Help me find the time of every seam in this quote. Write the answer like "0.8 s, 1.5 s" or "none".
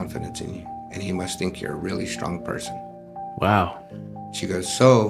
none